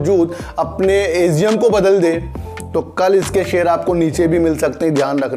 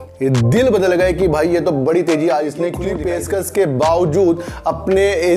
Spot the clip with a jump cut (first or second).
second